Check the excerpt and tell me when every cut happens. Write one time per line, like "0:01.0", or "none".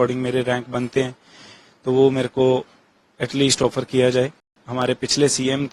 0:04.5